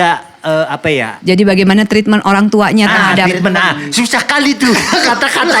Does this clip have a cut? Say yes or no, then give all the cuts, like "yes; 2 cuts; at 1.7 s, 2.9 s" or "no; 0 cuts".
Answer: yes; 1 cut; at 1.1 s